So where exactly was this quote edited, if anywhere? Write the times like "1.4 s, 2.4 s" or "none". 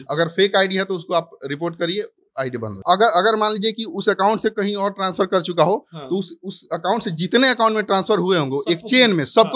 2.8 s